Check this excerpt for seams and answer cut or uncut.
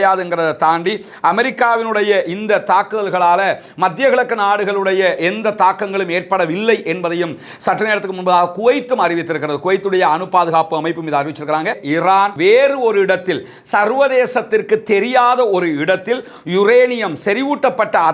cut